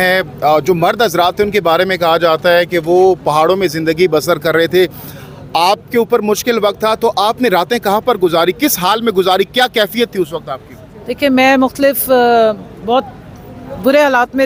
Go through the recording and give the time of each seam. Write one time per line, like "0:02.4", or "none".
none